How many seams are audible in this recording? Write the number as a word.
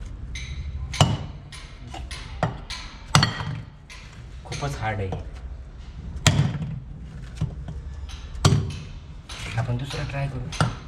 zero